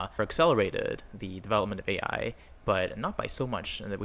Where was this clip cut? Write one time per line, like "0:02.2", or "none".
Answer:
none